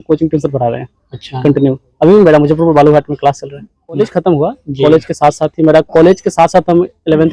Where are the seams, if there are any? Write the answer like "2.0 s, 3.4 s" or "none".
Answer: 4.0 s